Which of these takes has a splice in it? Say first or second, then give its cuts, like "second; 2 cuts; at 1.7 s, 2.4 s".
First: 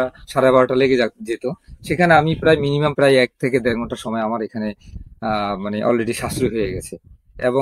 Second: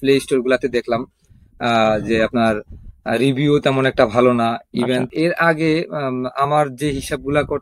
second; 1 cut; at 5.1 s